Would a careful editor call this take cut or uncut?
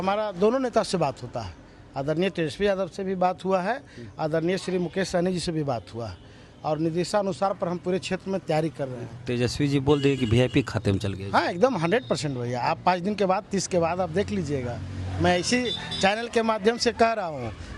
uncut